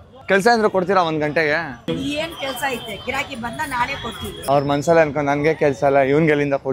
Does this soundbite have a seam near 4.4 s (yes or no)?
yes